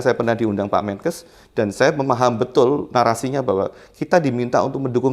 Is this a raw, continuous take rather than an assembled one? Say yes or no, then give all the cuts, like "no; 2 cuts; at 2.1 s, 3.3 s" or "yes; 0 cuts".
yes; 0 cuts